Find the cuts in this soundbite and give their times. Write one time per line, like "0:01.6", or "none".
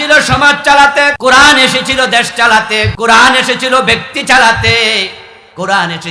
0:01.2
0:02.9